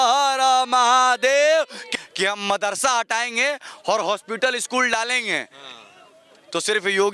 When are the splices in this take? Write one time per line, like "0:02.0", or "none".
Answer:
0:01.8